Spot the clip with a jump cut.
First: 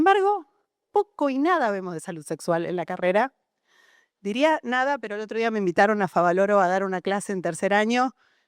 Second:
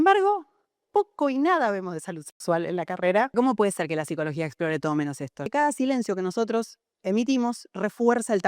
second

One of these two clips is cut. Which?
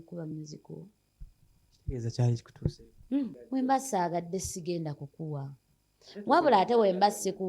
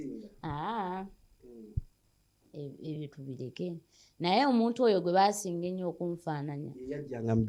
first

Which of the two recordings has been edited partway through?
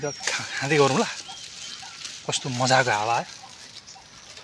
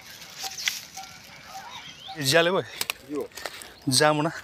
second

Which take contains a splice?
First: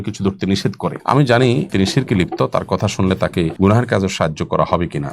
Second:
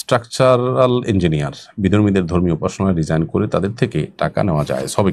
first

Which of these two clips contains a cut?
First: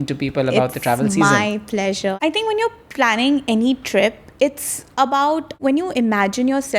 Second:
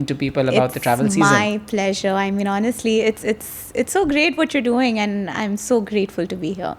first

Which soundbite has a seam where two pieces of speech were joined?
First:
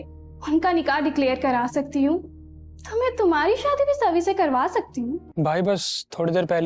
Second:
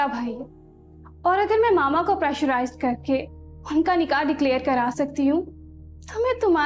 first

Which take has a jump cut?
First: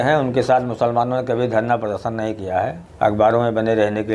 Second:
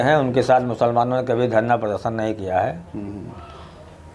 first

